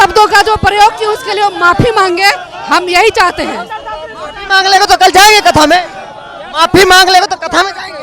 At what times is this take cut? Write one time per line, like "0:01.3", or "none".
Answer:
none

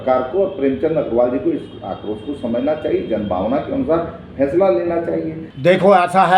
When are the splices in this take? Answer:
0:05.4

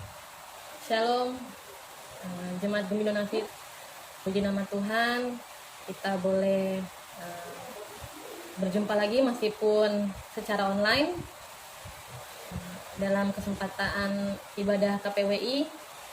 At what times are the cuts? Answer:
0:03.4

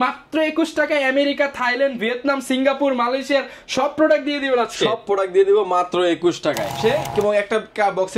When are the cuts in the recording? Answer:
0:06.7

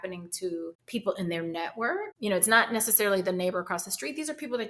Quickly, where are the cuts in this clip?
0:02.1

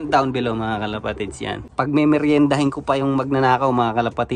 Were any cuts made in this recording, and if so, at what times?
0:01.6

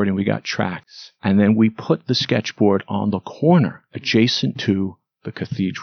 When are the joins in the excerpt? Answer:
none

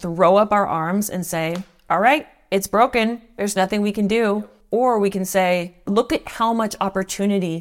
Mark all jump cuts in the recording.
0:04.5
0:05.9

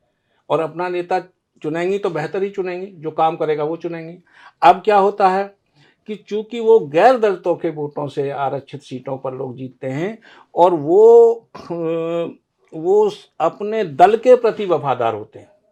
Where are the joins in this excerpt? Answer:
none

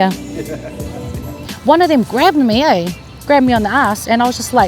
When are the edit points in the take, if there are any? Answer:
0:01.5

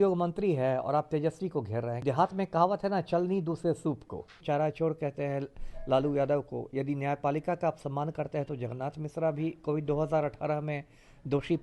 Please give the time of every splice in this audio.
0:02.0
0:04.4

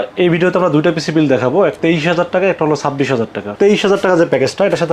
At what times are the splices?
0:01.8
0:03.5

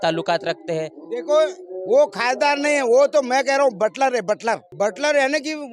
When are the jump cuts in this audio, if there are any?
0:04.7

